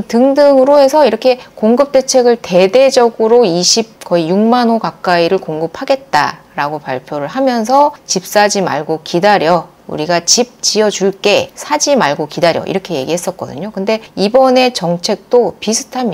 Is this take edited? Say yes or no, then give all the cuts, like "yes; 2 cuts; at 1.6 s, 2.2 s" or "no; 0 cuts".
no; 0 cuts